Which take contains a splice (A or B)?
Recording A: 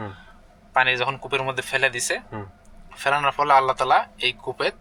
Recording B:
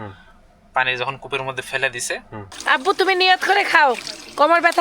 B